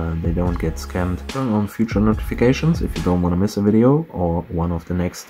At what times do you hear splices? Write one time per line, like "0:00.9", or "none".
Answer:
none